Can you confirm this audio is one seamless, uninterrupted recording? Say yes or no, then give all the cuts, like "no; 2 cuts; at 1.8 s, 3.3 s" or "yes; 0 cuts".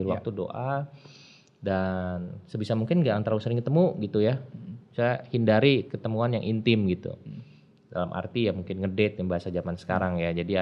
yes; 0 cuts